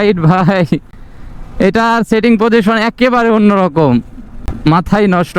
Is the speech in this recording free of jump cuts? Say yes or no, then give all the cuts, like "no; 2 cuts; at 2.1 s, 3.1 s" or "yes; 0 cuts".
yes; 0 cuts